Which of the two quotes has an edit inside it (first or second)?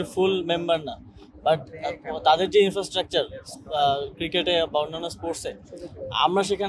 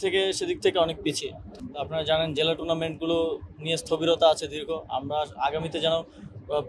second